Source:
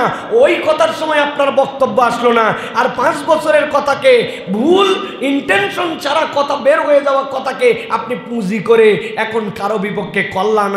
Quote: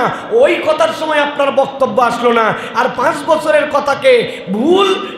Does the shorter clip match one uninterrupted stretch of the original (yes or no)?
yes